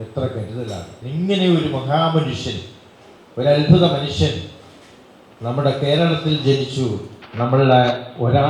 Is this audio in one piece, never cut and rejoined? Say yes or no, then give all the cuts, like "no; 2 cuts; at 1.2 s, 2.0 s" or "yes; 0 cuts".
no; 1 cut; at 1.0 s